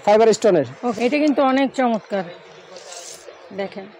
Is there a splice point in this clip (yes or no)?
yes